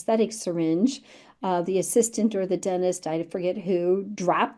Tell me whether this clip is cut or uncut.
uncut